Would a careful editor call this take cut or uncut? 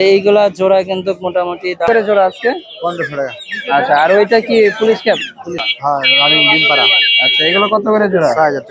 cut